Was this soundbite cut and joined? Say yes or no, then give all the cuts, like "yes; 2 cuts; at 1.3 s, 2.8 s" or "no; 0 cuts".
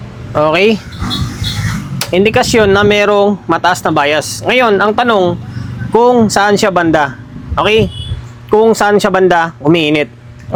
no; 0 cuts